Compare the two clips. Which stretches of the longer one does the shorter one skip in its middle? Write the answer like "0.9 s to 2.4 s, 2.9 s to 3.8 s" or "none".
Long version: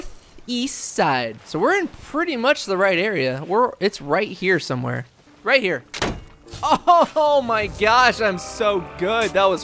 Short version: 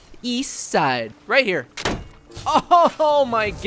1.4 s to 5.3 s